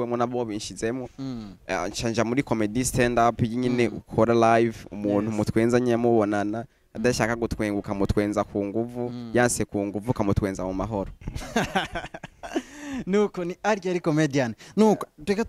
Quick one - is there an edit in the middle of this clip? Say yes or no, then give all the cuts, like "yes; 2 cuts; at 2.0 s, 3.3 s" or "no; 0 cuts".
no; 0 cuts